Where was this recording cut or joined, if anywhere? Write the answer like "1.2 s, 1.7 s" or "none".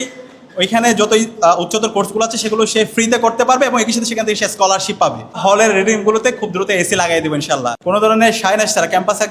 5.4 s, 7.7 s